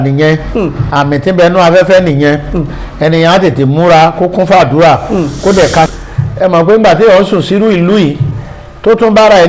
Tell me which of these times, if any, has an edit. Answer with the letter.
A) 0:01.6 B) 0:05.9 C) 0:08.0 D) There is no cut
B